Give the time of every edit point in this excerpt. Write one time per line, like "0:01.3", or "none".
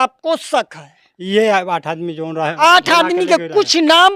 none